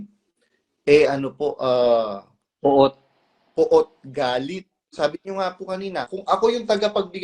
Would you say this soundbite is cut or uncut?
cut